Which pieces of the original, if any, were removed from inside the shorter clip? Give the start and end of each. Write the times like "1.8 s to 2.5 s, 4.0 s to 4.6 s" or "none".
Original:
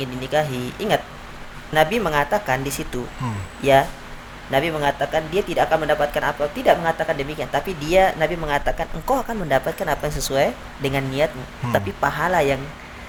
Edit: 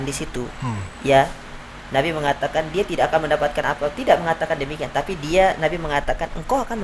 none

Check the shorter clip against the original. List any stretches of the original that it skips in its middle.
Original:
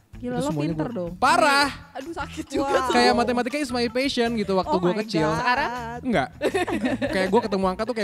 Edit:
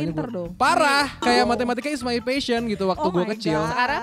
1.8 s to 2.9 s

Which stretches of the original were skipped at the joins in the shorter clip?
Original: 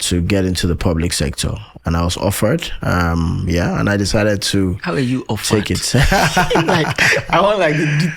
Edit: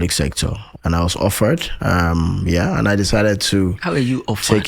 none

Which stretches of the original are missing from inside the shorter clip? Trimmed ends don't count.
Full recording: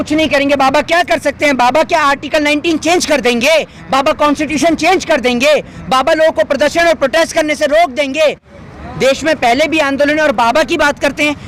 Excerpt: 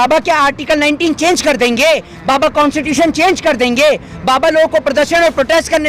none

